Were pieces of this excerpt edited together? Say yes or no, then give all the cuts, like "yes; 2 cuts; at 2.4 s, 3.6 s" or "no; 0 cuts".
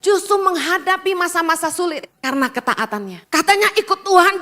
yes; 2 cuts; at 2.1 s, 3.2 s